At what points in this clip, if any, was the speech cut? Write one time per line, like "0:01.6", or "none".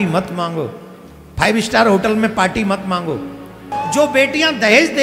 0:03.7